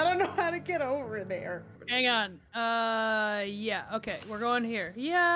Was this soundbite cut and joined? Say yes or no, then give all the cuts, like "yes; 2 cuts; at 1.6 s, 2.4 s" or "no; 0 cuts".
yes; 1 cut; at 1.7 s